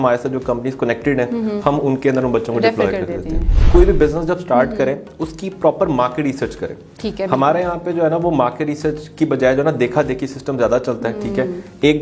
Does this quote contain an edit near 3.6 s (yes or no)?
yes